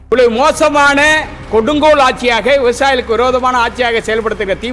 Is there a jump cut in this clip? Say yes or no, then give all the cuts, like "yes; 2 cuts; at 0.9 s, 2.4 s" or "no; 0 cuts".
no; 0 cuts